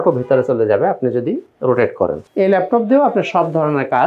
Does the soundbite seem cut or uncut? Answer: cut